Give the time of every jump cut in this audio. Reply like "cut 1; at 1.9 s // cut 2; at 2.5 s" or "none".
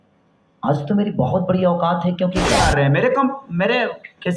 cut 1; at 2.5 s